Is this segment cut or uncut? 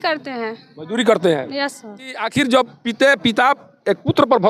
cut